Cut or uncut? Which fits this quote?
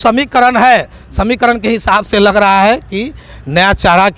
uncut